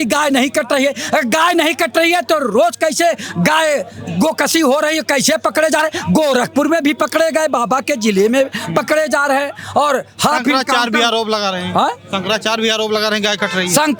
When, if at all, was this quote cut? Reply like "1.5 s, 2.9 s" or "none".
none